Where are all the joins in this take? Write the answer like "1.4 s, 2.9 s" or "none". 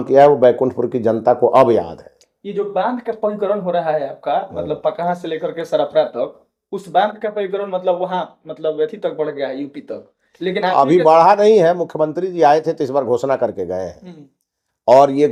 none